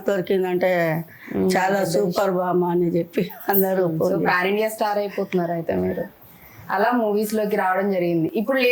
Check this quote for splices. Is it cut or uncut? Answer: uncut